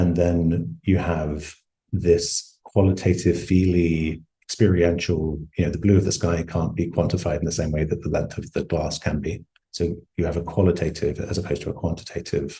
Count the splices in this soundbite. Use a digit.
0